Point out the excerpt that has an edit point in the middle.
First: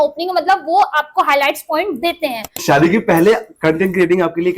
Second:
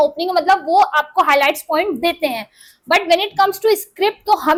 first; 1 cut; at 2.6 s

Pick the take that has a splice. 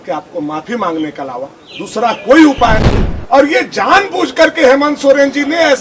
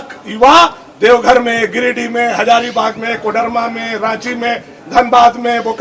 first; 1 cut; at 2.9 s

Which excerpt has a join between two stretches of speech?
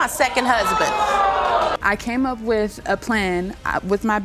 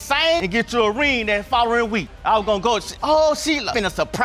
first; 1 cut; at 1.7 s

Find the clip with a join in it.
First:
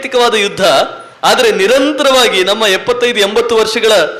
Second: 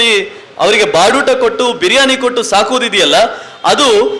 first; 1 cut; at 1.0 s

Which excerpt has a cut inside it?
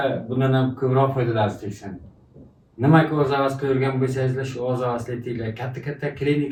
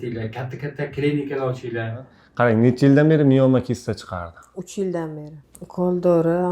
second; 2 cuts; at 2.3 s, 5.3 s

